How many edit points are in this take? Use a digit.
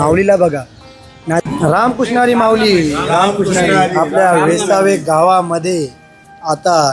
1